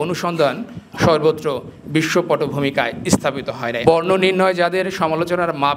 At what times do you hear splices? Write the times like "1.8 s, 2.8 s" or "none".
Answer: 3.8 s